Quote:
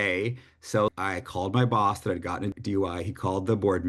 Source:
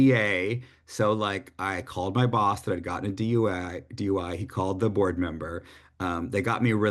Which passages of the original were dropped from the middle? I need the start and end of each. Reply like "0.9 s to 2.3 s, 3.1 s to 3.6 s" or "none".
1.2 s to 1.5 s, 3.1 s to 3.8 s